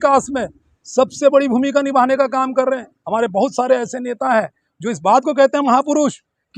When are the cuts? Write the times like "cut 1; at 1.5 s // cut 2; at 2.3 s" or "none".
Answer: none